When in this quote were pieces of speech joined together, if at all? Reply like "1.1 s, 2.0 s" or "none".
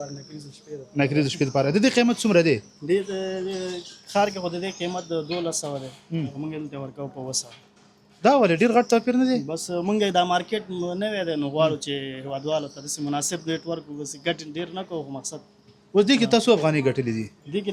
none